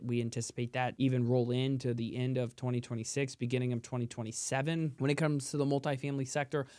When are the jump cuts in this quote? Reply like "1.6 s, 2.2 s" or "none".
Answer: 0.9 s, 4.9 s